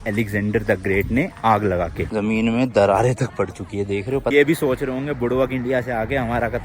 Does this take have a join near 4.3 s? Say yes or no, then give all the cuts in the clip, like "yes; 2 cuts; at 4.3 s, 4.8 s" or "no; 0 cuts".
yes; 2 cuts; at 2.0 s, 4.3 s